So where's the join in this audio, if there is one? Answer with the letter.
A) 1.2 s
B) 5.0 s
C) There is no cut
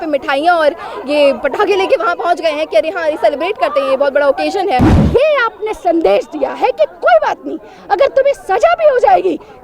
B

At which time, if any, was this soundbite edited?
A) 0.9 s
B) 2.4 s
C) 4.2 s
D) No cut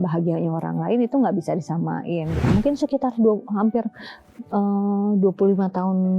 B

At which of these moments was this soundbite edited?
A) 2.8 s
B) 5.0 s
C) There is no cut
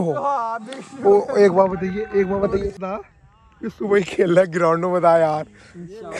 A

